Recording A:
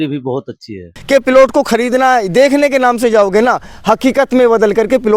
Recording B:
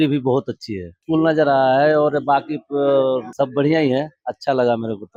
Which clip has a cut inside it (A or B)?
A